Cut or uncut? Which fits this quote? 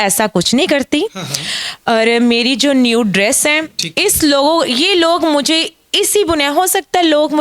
uncut